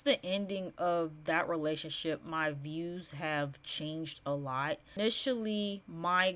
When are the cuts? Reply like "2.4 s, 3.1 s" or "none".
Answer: 4.9 s